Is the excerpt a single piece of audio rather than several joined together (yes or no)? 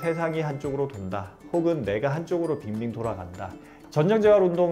no